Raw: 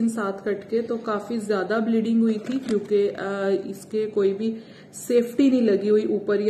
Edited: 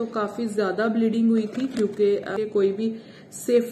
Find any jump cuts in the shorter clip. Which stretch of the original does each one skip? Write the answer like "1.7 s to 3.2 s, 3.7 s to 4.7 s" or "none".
3.3 s to 4.0 s